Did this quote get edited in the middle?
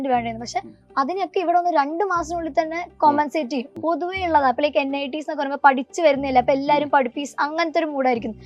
yes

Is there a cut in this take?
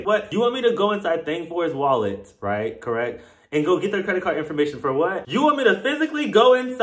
yes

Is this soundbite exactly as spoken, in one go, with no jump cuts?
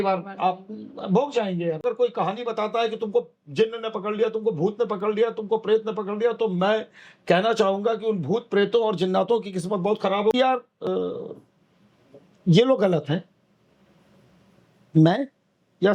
no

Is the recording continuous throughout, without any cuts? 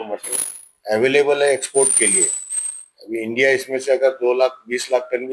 yes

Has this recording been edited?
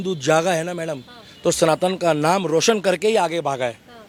no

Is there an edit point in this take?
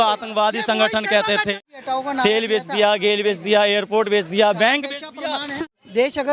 yes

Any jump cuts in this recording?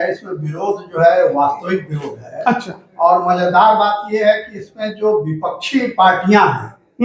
no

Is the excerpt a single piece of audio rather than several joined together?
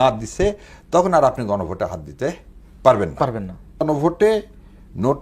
no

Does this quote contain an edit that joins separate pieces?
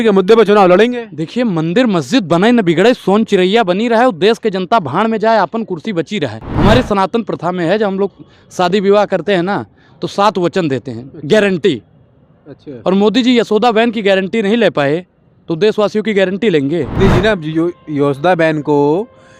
yes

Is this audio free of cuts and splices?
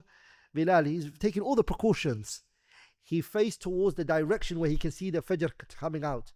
yes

